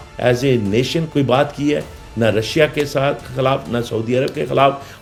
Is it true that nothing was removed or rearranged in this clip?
yes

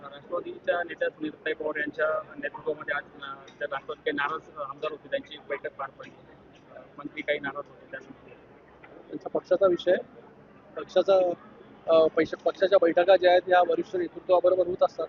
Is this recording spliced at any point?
no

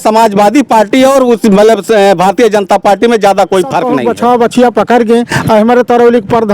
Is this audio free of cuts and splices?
no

